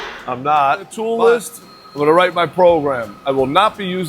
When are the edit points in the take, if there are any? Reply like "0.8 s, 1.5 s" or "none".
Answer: 0.9 s